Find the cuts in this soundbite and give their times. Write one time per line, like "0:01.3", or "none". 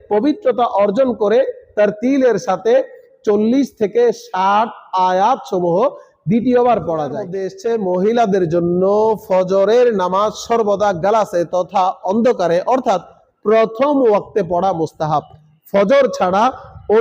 0:07.5